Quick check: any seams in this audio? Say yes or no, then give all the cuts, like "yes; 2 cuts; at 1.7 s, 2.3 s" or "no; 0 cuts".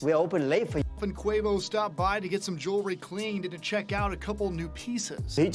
yes; 1 cut; at 0.9 s